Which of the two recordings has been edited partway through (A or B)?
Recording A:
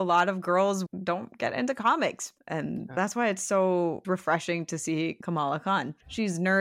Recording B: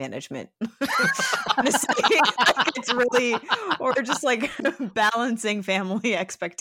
A